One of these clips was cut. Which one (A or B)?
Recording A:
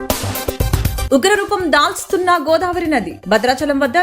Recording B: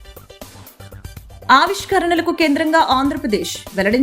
A